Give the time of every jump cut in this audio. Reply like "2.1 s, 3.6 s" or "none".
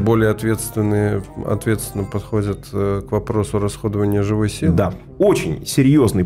5.0 s